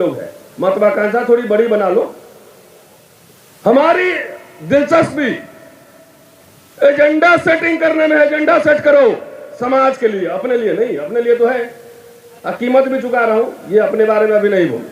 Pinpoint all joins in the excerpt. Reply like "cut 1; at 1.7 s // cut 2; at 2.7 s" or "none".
none